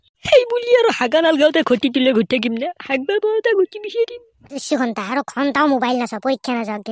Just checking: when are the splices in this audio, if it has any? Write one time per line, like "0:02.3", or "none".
0:04.7